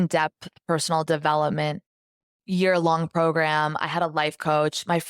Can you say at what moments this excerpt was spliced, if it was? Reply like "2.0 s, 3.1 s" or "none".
none